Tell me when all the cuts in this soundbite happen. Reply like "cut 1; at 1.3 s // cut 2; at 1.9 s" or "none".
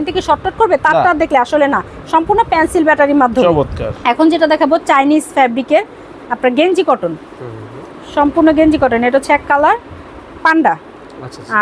cut 1; at 3.9 s